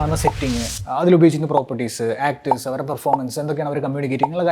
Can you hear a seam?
no; 0 cuts

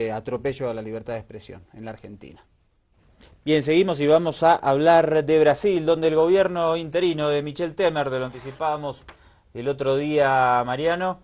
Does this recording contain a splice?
yes; 1 cut; at 9.9 s

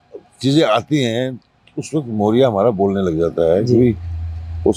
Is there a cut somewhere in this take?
no; 0 cuts

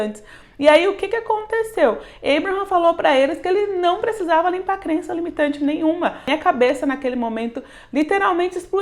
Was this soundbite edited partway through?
yes; 1 cut; at 6.3 s

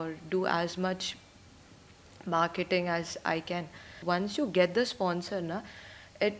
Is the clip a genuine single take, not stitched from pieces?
no; 1 cut; at 4.0 s

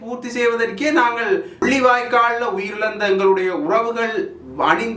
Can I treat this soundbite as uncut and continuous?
no; 1 cut; at 1.6 s

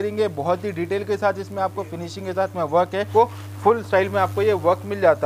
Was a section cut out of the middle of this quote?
yes; 1 cut; at 3.1 s

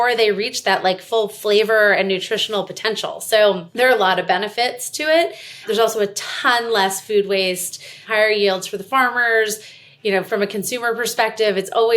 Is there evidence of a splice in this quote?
yes; 3 cuts; at 3.7 s, 5.6 s, 8.0 s

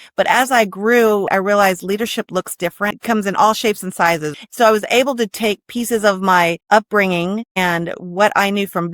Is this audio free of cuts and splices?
no; 5 cuts; at 1.3 s, 2.9 s, 4.3 s, 6.6 s, 7.5 s

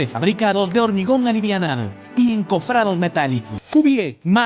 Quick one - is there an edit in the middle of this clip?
yes; 1 cut; at 3.5 s

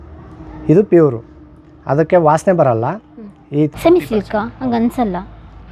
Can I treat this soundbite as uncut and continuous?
no; 1 cut; at 3.7 s

